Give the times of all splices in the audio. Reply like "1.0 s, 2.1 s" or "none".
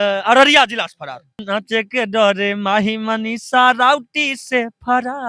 1.4 s

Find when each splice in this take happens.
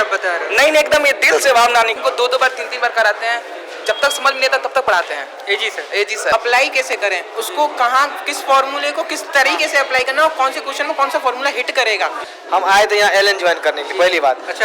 2.0 s, 6.3 s, 12.3 s

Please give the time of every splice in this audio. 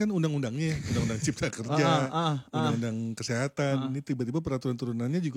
none

